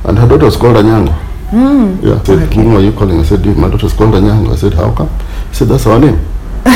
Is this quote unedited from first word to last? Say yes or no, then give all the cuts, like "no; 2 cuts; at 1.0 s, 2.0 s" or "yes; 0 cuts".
no; 1 cut; at 2.2 s